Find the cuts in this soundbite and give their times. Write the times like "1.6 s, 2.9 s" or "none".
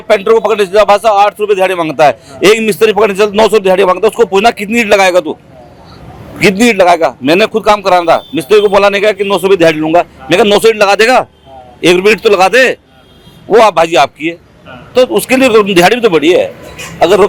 none